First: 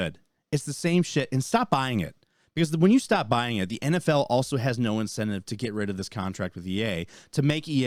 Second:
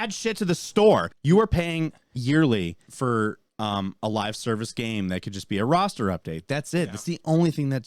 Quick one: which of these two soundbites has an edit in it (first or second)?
second